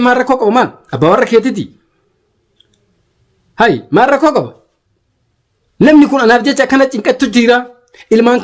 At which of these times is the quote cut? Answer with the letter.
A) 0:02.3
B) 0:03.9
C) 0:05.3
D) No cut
D